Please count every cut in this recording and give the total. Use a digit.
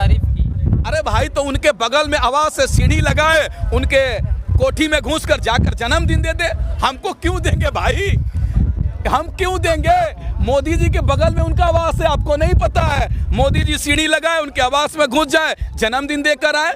0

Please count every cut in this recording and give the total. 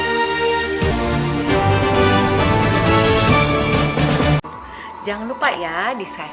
1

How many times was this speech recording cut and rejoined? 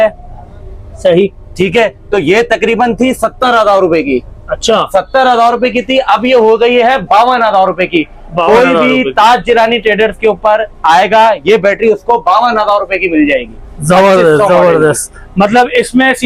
0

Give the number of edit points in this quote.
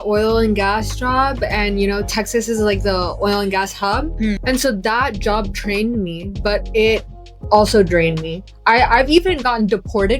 2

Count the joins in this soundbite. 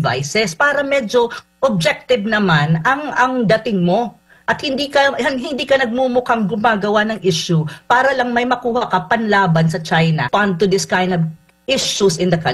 1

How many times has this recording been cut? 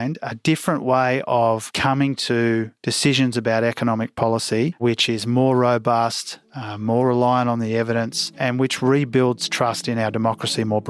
3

